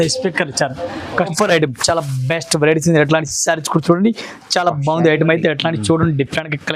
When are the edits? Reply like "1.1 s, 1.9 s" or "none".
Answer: 1.3 s